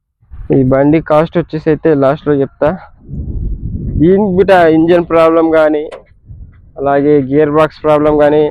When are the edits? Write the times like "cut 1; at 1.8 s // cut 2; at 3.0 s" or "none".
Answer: none